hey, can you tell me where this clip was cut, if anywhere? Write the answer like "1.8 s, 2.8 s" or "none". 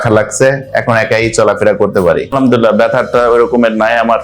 2.4 s